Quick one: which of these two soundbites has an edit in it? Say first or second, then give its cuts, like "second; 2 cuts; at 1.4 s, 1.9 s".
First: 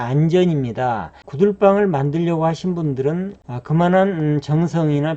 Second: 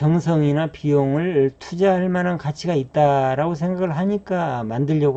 first; 2 cuts; at 1.2 s, 3.4 s